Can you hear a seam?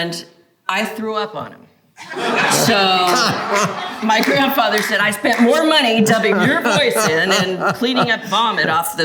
no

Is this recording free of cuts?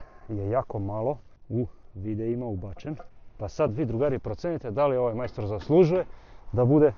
yes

